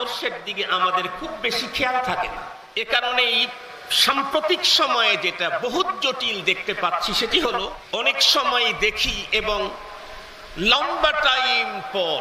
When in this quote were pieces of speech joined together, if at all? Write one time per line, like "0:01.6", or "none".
0:02.6
0:07.8